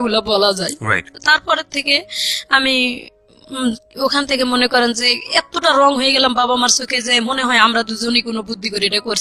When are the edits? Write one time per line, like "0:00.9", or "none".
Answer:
none